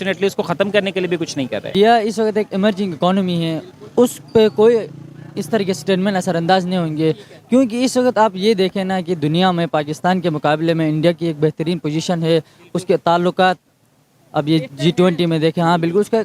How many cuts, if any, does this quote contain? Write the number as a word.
one